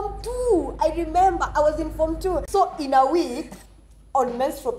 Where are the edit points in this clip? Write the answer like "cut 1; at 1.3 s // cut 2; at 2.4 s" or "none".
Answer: cut 1; at 2.4 s